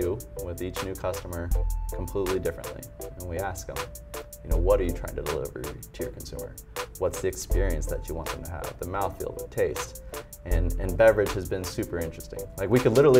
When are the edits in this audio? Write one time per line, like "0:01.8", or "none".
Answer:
none